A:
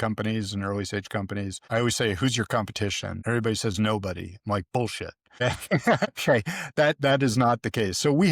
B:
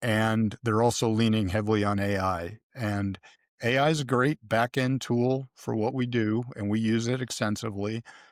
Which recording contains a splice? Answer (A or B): A